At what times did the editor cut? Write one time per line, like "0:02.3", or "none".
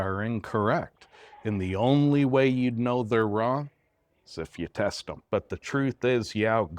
0:05.1